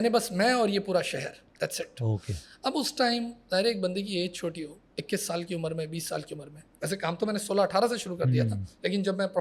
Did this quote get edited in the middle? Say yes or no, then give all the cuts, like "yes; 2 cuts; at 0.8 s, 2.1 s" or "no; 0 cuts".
no; 0 cuts